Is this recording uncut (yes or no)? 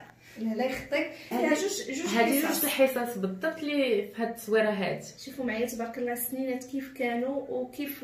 no